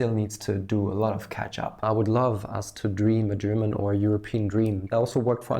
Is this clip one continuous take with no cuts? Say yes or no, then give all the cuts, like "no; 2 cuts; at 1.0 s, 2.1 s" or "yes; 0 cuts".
no; 2 cuts; at 1.8 s, 4.9 s